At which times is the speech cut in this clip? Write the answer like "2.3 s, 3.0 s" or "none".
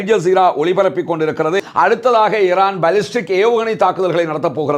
1.6 s